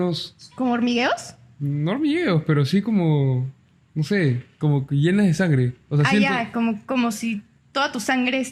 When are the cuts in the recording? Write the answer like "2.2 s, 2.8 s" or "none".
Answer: none

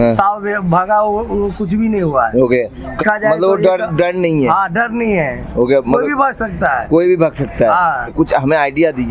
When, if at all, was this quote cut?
3.0 s, 8.1 s

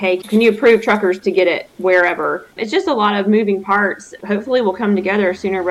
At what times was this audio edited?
2.5 s

